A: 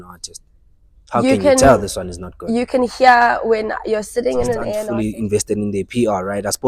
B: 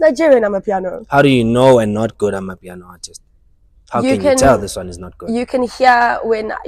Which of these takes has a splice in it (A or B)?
A